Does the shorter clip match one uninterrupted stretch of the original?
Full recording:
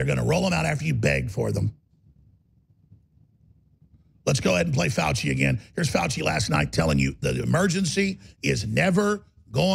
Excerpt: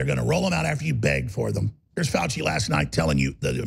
no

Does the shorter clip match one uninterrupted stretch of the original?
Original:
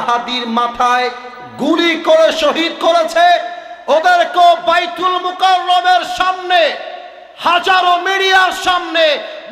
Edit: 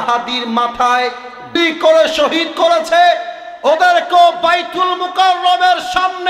no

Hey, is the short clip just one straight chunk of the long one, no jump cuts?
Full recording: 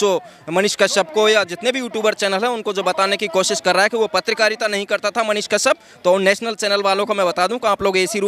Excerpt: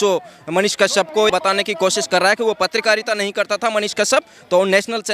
no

